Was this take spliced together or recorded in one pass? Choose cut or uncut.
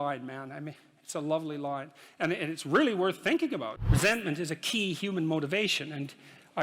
cut